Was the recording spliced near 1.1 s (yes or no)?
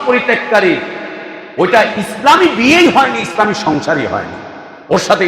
no